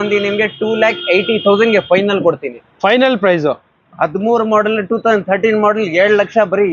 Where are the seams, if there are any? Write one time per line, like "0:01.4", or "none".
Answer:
none